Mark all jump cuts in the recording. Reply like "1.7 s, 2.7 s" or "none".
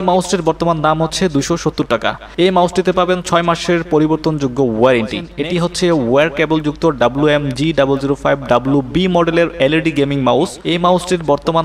5.3 s, 10.6 s